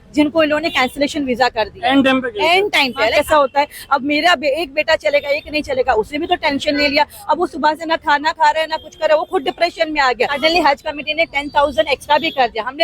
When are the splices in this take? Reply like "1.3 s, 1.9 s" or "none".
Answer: 3.1 s, 10.3 s